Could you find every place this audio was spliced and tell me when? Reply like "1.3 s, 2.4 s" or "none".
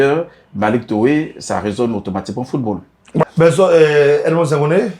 3.2 s